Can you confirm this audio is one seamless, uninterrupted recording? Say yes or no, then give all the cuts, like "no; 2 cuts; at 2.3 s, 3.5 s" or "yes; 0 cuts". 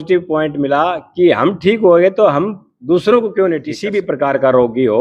no; 1 cut; at 3.9 s